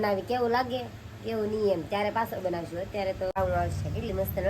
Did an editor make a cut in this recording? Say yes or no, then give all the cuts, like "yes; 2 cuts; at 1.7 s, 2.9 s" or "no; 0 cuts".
yes; 1 cut; at 3.4 s